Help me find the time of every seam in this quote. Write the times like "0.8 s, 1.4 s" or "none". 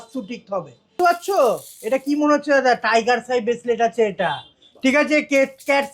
0.9 s